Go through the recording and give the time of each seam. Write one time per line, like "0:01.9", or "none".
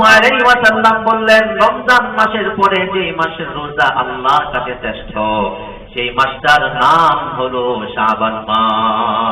none